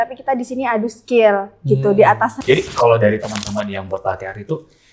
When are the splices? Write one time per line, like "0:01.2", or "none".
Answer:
0:02.4